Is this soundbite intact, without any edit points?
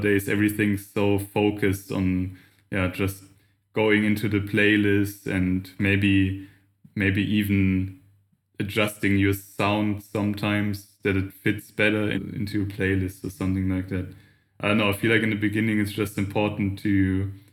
no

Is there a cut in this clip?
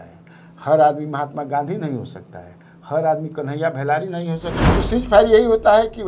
yes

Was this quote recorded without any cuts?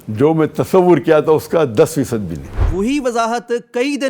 no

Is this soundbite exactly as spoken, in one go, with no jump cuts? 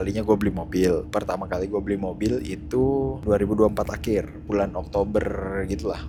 yes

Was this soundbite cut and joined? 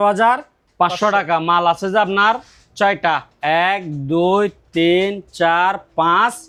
no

